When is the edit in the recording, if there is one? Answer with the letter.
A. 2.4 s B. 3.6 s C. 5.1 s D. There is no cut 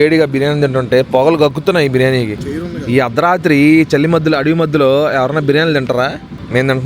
A